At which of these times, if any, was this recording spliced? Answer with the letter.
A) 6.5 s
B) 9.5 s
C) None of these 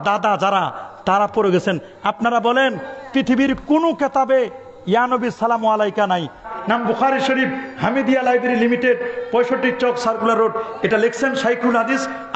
A